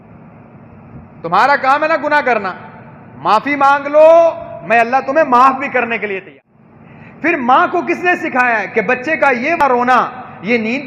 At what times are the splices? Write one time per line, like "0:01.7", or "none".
0:06.3
0:09.6